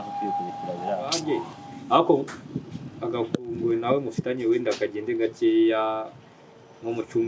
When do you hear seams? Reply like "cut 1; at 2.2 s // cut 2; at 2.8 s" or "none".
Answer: cut 1; at 1.2 s